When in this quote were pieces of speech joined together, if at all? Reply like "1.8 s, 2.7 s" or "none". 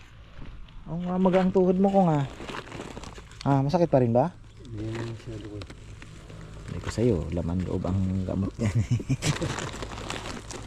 none